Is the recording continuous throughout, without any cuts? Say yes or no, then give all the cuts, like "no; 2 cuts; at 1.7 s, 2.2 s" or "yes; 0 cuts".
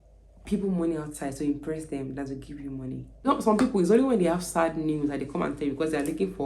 no; 1 cut; at 3.2 s